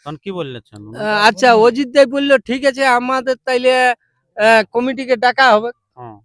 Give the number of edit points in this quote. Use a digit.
0